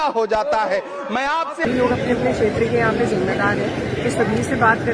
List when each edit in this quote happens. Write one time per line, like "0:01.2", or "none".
0:01.6